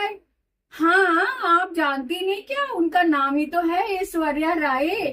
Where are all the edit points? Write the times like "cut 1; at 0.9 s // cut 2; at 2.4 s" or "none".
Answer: none